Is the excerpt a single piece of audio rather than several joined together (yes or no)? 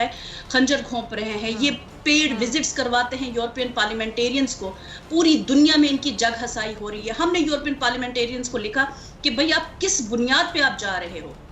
yes